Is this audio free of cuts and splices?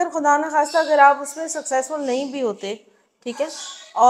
yes; 0 cuts

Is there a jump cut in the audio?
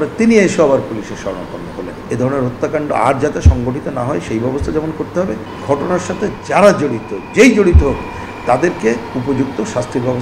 yes; 2 cuts; at 2.1 s, 5.5 s

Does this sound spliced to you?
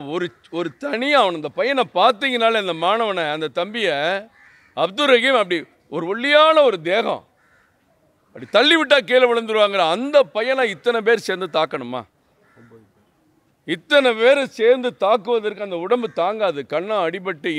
no; 0 cuts

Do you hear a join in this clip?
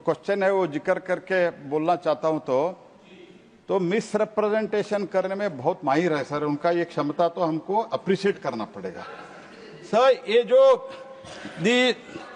no; 0 cuts

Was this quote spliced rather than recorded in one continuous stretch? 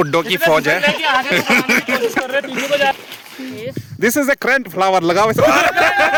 no; 0 cuts

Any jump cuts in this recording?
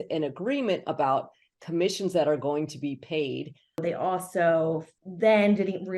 yes; 1 cut; at 3.8 s

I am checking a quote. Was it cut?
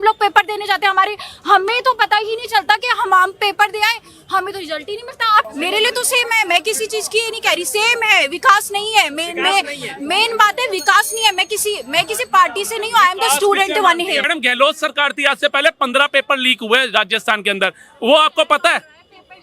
yes; 2 cuts; at 5.5 s, 14.2 s

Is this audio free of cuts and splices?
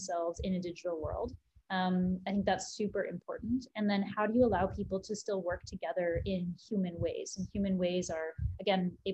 yes; 0 cuts

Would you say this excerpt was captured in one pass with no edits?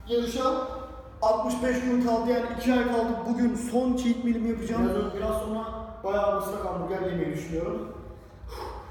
no; 1 cut; at 4.9 s

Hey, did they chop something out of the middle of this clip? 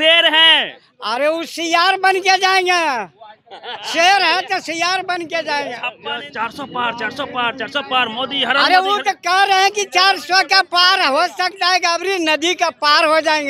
yes; 1 cut; at 5.9 s

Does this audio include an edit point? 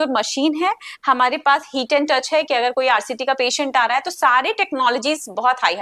no; 0 cuts

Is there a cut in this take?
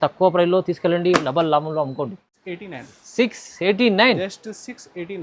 yes; 1 cut; at 2.5 s

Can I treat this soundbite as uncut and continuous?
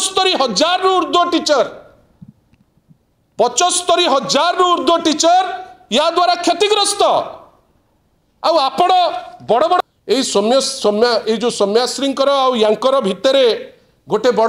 no; 1 cut; at 9.8 s

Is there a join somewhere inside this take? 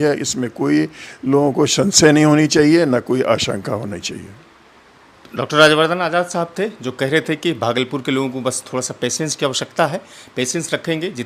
no; 0 cuts

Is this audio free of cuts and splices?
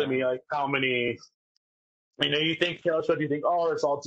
yes; 0 cuts

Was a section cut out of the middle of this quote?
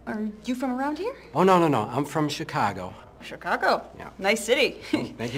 yes; 1 cut; at 1.7 s

